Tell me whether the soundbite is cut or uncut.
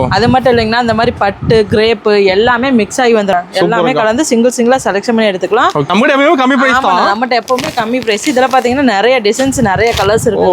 cut